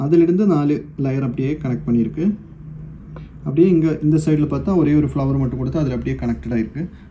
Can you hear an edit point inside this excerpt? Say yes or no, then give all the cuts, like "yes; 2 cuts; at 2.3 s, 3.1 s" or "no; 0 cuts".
no; 0 cuts